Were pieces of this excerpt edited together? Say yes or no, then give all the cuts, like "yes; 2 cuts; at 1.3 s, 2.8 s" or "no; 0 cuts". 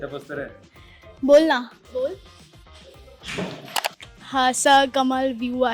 yes; 2 cuts; at 1.8 s, 3.9 s